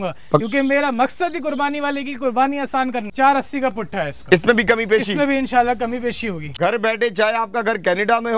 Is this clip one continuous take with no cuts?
no; 2 cuts; at 3.0 s, 6.5 s

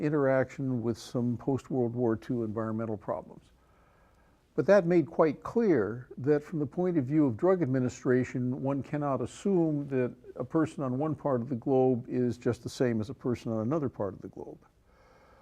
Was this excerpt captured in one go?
no; 1 cut; at 11.2 s

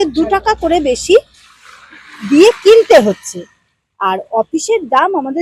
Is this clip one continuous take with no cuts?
yes; 0 cuts

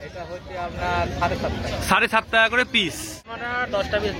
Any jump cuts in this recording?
yes; 1 cut; at 3.3 s

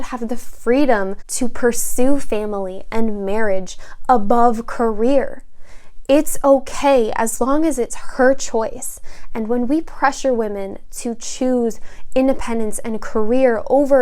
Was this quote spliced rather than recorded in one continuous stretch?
yes; 1 cut; at 1.2 s

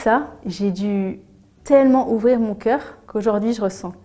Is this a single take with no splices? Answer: no; 1 cut; at 3.0 s

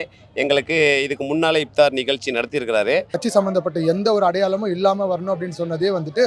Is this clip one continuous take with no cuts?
no; 1 cut; at 3.2 s

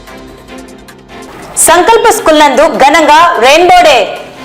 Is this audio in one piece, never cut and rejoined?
no; 1 cut; at 1.2 s

